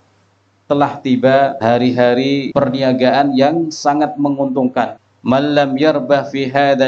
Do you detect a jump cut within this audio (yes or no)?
yes